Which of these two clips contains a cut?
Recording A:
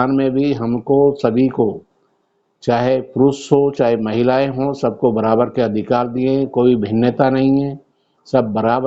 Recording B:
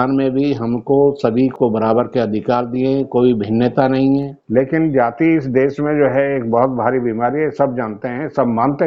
B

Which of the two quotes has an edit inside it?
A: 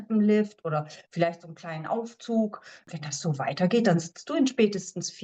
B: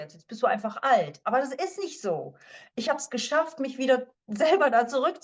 A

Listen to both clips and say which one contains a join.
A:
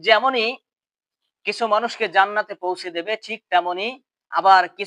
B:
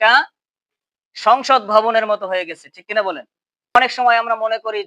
B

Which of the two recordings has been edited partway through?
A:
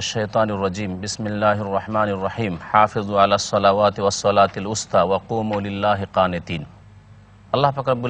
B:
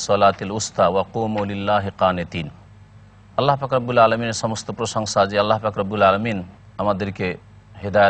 B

